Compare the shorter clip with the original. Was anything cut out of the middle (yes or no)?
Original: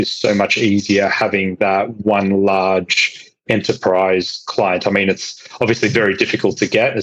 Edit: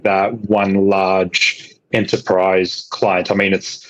no